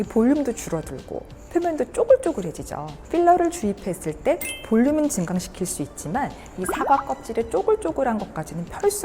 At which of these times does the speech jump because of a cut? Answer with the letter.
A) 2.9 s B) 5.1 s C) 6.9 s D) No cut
A